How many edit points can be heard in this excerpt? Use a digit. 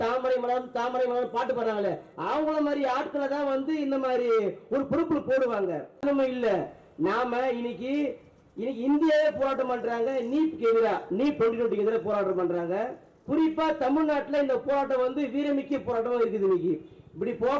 1